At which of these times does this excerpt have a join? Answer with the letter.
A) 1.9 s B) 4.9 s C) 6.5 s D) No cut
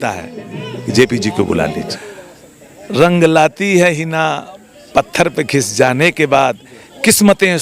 A